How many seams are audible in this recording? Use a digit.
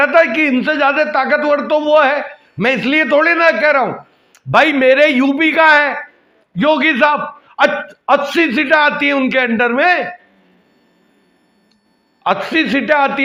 0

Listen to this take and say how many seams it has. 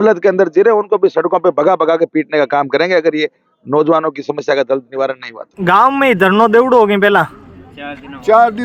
1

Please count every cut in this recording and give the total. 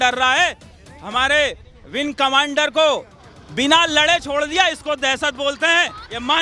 0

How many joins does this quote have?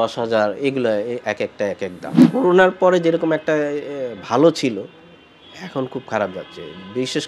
1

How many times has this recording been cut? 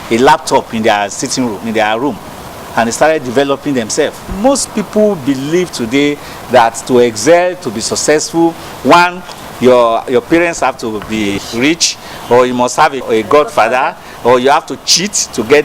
3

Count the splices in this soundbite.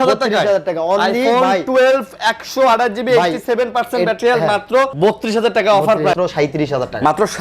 2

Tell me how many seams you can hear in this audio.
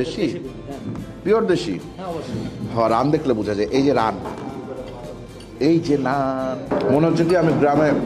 1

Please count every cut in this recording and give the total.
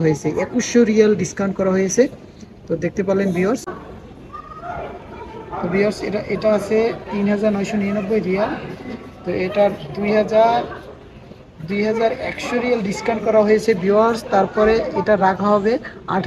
1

